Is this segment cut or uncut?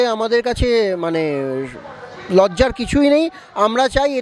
uncut